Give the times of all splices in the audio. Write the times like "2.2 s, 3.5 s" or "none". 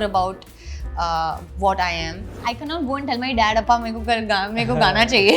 2.3 s